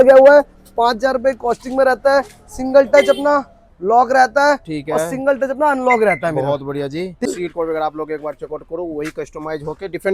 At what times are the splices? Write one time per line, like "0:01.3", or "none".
0:07.2